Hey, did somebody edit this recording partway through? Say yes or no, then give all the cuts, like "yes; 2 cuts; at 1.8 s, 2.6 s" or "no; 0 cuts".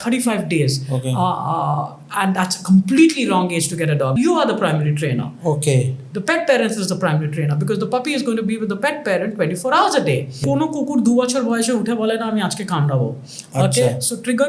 yes; 2 cuts; at 4.1 s, 10.4 s